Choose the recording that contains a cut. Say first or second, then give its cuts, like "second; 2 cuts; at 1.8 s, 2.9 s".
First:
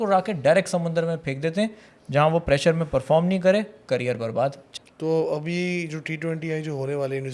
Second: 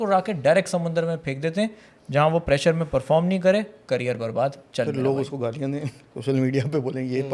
first; 1 cut; at 4.6 s